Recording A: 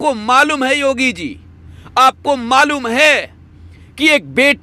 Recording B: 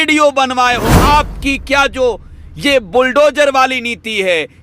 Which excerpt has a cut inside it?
B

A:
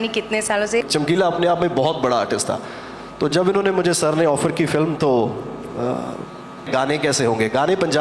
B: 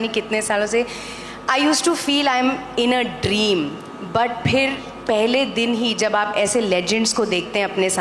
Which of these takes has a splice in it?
A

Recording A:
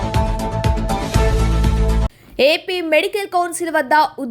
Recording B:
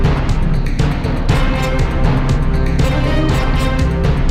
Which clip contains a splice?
A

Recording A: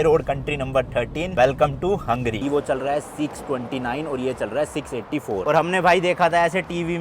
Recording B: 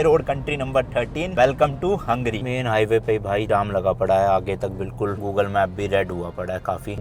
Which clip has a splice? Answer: A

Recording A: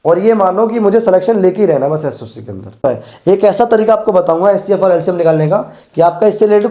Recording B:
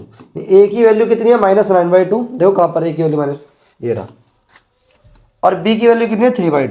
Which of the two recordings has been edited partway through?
A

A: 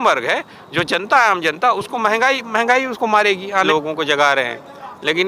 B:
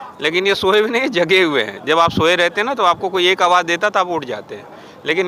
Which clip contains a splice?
A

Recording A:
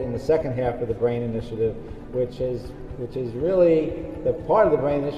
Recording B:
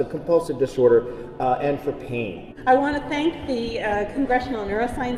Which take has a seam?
B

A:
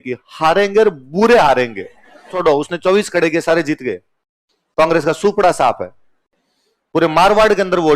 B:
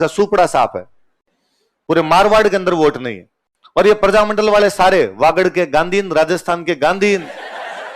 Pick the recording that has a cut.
A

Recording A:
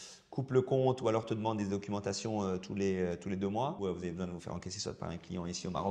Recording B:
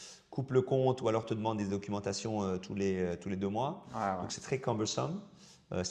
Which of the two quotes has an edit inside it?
A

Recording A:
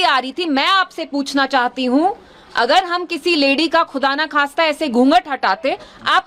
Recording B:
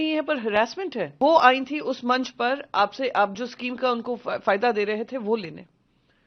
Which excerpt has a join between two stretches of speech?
B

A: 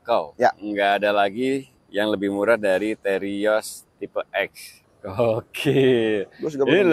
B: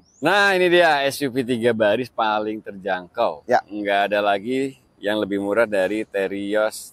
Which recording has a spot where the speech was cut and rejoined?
A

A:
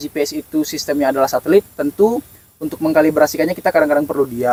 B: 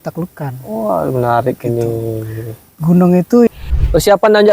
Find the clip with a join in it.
B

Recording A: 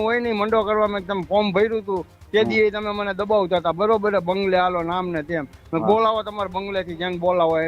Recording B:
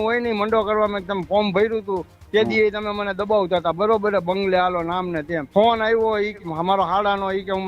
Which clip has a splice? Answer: B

